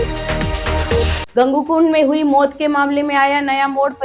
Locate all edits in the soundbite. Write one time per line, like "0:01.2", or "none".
0:01.0